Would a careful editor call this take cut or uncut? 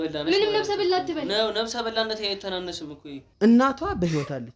cut